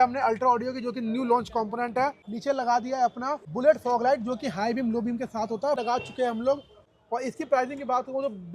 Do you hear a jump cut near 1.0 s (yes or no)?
no